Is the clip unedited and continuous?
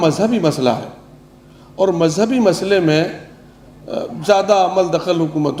yes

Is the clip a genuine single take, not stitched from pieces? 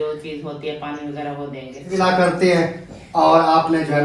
no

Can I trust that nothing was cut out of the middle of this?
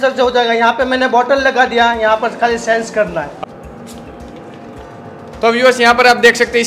no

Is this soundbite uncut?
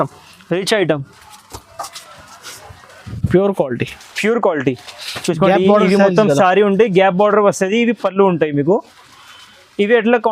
no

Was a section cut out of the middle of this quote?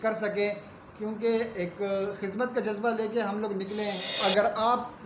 yes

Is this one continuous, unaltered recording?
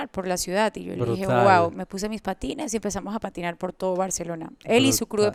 yes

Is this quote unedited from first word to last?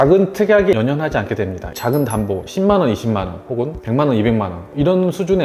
no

